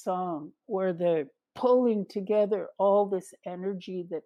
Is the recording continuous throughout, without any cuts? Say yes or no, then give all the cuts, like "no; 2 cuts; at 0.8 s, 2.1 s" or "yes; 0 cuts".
yes; 0 cuts